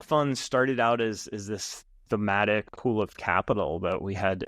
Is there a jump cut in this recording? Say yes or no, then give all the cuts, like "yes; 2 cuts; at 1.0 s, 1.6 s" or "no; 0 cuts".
yes; 1 cut; at 2.7 s